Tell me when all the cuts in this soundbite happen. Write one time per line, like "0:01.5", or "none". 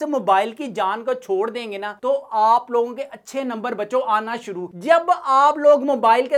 none

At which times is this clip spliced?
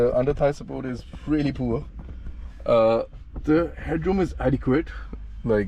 none

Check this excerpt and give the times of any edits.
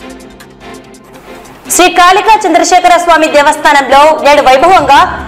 0:01.1

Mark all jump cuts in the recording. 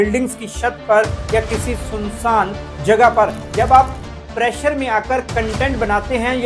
0:03.4

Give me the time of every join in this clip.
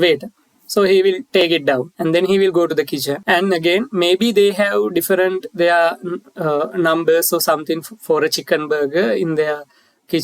0:01.5
0:03.2

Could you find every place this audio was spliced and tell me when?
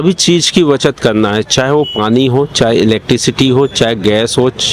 none

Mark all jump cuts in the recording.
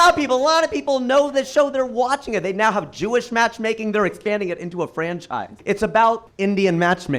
0:05.5
0:06.3

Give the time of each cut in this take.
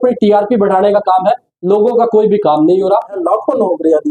0:03.2

